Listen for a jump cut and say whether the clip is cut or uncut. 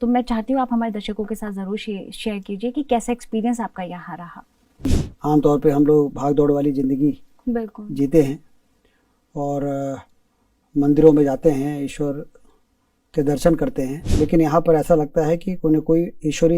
cut